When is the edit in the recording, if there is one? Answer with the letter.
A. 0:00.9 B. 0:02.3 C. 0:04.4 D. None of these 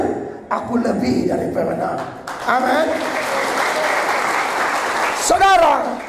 D